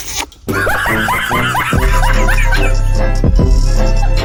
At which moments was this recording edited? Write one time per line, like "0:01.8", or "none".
none